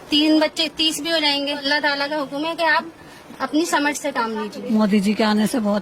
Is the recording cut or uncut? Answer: cut